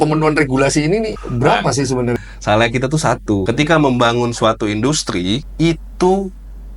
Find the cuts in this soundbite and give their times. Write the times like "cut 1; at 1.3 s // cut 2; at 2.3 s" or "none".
cut 1; at 1.2 s // cut 2; at 2.2 s // cut 3; at 3.4 s // cut 4; at 5.5 s